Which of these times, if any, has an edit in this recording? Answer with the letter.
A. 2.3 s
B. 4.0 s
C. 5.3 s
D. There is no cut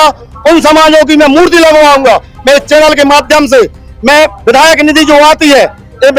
D